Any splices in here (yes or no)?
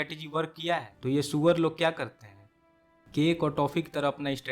yes